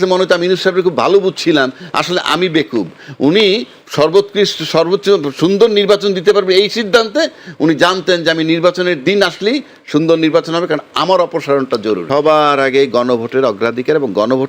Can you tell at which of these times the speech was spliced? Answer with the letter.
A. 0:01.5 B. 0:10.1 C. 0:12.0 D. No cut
C